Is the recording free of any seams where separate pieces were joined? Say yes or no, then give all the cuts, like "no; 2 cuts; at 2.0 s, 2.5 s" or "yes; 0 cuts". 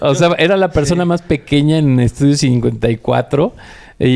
yes; 0 cuts